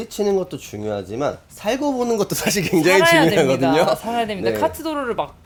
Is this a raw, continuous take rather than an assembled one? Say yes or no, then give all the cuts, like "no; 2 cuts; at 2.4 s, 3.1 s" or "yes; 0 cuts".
yes; 0 cuts